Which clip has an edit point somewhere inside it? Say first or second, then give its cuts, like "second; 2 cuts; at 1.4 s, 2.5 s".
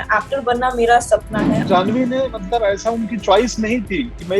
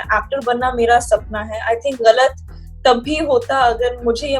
first; 1 cut; at 1.6 s